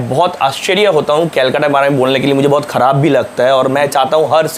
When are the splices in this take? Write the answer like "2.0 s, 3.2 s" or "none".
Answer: none

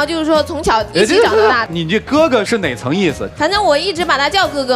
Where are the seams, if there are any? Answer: none

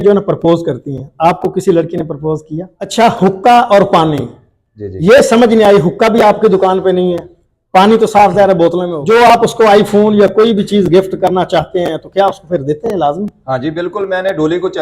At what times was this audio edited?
2.8 s, 8.9 s

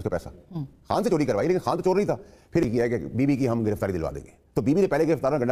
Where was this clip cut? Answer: 2.7 s

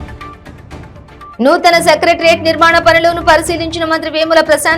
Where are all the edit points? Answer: 1.2 s

